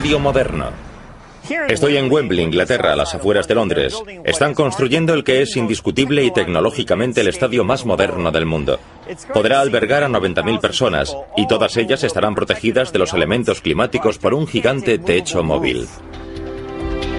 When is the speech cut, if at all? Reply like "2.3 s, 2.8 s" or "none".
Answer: 8.8 s